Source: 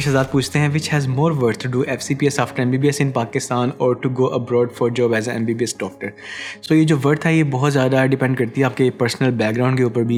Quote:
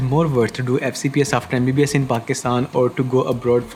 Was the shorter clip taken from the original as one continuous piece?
yes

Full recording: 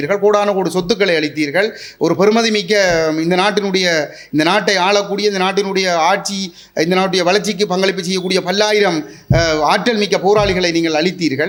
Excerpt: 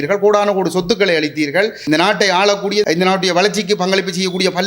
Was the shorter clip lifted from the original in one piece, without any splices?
no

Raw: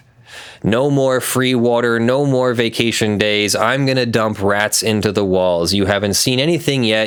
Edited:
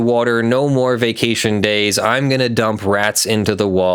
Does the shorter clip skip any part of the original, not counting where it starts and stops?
no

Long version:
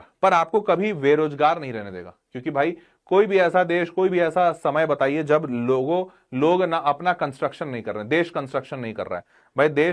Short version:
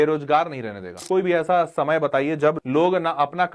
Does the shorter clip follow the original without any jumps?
no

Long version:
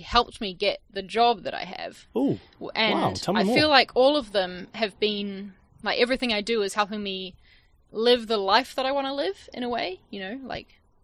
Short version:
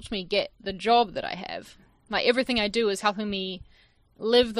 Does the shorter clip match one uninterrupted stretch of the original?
no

